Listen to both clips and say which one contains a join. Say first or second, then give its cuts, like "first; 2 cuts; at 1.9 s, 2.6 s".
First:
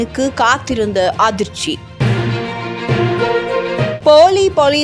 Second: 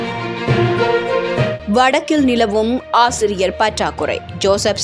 second; 1 cut; at 1.6 s